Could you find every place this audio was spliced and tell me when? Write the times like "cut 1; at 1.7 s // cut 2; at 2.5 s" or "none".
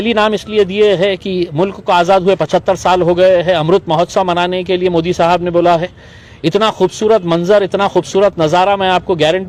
none